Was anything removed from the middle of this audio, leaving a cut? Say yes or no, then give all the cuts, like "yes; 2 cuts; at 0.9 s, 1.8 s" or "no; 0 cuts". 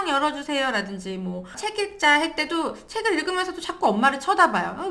yes; 1 cut; at 1.6 s